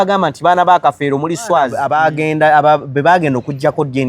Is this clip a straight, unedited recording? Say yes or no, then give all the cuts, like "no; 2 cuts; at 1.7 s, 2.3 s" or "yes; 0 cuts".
no; 1 cut; at 1.8 s